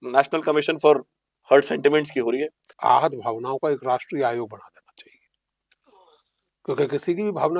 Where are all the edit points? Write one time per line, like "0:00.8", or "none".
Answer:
0:02.7